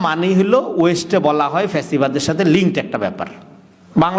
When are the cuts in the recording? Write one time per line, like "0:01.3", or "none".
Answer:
none